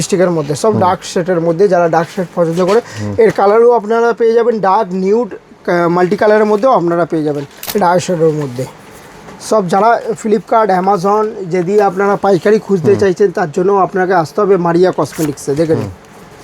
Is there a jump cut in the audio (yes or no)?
yes